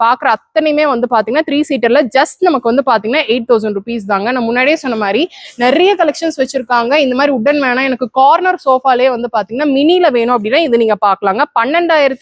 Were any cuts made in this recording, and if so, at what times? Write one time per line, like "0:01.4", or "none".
none